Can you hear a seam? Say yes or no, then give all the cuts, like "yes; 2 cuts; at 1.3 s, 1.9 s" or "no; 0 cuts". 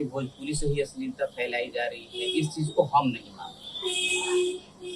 no; 0 cuts